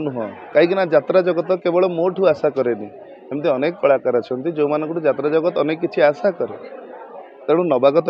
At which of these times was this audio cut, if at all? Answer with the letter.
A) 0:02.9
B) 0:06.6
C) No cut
C